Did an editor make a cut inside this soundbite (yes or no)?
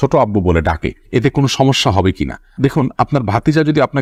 no